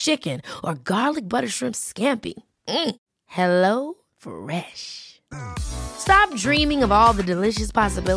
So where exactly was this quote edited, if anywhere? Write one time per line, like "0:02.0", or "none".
none